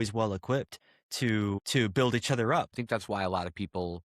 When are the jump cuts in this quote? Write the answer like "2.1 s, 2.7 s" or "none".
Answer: 1.6 s, 2.7 s